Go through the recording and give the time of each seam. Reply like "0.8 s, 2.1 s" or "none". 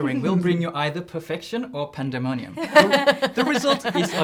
none